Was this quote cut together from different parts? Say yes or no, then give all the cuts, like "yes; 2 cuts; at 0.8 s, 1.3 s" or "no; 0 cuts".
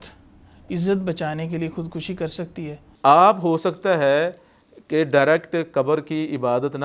yes; 1 cut; at 2.8 s